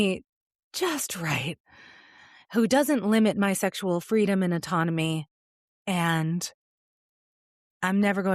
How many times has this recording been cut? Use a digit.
0